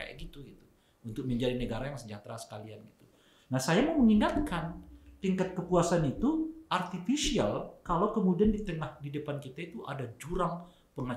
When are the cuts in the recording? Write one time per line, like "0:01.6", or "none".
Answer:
none